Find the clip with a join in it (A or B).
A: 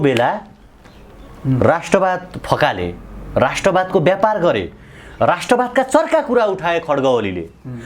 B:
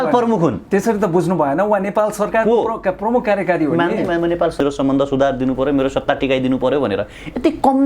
B